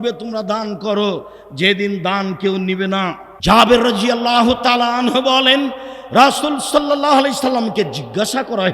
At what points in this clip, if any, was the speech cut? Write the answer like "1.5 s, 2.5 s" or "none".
3.3 s